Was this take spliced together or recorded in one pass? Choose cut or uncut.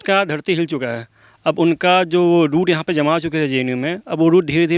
uncut